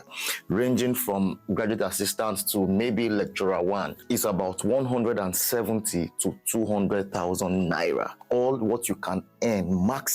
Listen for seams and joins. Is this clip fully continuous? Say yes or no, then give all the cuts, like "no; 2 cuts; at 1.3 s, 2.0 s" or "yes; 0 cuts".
no; 1 cut; at 8.2 s